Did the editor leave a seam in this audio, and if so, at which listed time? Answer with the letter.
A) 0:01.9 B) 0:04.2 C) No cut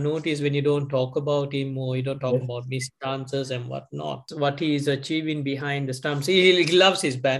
B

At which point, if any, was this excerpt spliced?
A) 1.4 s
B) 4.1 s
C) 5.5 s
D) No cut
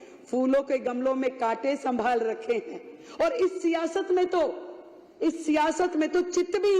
D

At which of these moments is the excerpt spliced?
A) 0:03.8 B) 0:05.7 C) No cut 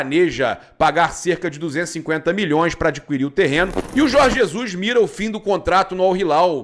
A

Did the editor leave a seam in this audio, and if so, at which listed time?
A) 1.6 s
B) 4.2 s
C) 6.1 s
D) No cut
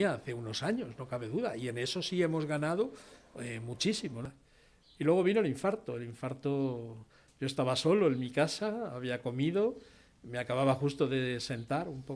B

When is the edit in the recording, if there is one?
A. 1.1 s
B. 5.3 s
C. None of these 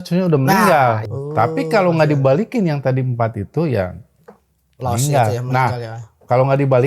A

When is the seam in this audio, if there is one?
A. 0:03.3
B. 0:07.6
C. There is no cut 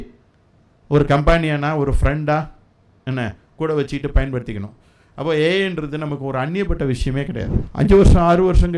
B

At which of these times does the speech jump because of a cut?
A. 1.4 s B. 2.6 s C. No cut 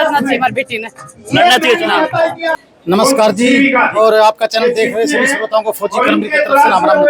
B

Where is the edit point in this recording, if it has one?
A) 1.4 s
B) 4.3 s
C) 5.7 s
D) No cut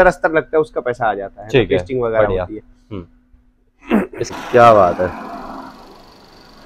B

